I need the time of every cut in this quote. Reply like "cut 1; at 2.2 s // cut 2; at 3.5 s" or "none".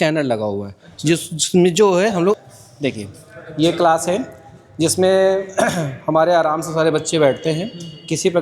cut 1; at 2.4 s